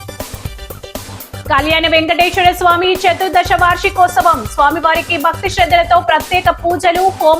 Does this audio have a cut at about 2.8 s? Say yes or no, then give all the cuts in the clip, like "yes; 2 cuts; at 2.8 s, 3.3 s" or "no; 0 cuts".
no; 1 cut; at 1.0 s